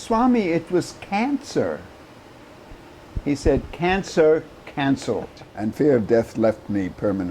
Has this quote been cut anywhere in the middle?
yes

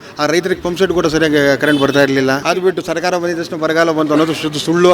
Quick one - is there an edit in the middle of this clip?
yes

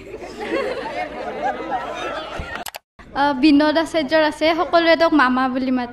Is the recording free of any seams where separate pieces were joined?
no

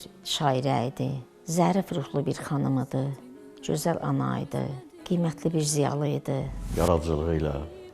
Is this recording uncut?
no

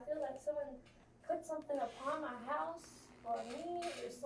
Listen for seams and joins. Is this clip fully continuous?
yes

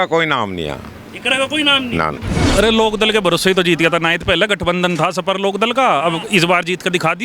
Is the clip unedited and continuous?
no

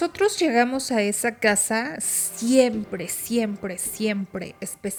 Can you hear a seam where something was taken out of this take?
no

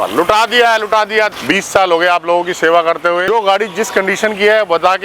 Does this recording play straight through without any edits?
no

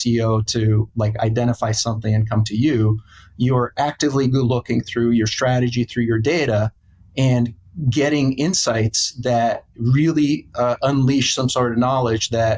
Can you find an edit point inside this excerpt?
no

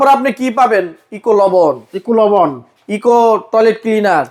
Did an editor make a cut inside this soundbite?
no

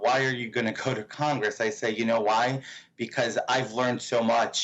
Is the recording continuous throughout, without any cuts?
yes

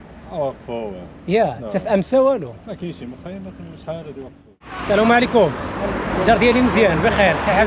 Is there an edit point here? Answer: yes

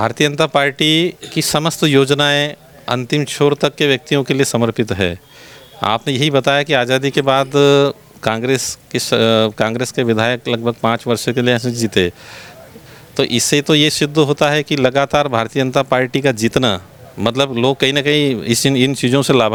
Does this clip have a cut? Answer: no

